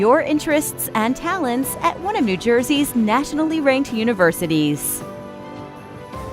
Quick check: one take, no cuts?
no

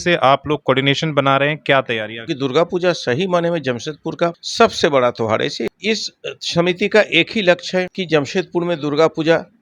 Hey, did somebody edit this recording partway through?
yes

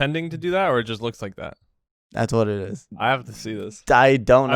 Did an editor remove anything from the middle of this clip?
yes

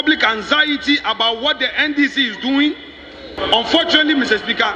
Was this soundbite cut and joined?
yes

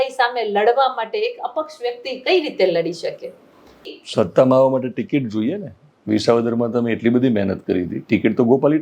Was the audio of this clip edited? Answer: yes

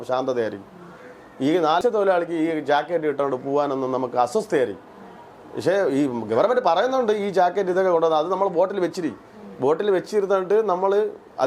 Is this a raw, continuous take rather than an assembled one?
no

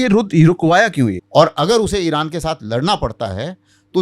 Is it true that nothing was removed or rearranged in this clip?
no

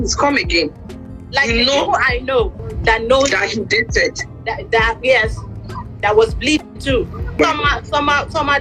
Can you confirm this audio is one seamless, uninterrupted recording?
no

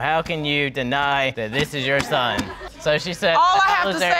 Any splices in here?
no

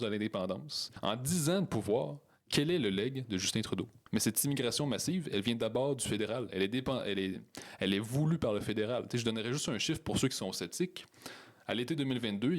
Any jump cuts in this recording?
yes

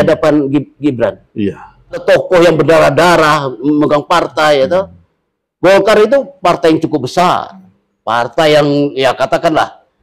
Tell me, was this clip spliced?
yes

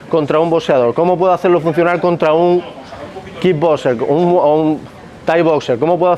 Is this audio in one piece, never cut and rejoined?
yes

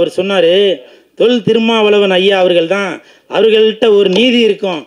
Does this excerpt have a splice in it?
no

